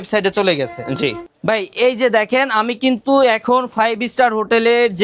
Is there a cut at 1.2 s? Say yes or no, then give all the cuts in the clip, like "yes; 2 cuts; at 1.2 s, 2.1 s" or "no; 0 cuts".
yes; 1 cut; at 1.2 s